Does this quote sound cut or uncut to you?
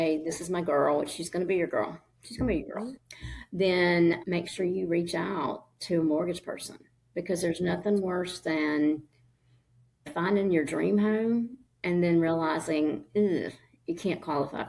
uncut